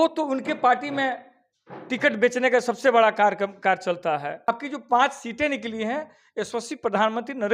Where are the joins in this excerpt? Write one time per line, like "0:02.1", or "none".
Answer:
0:04.5

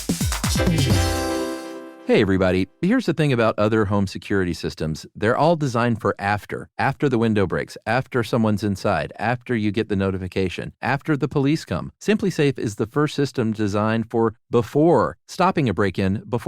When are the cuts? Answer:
0:01.8

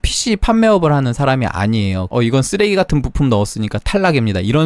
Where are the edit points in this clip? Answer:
0:02.0

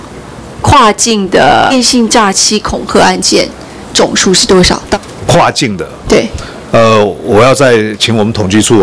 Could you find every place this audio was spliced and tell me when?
0:01.7
0:04.9

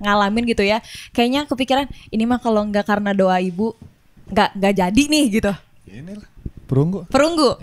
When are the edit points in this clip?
none

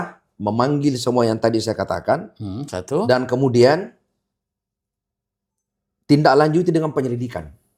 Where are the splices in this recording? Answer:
none

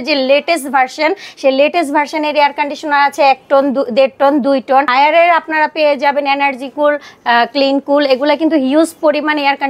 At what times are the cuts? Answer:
none

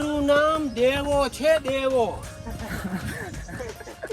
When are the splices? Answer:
0:02.4

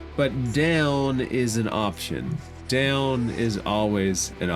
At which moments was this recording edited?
none

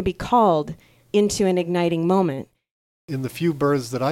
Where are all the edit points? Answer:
0:02.8

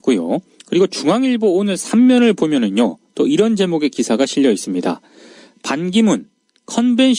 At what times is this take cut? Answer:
0:05.9

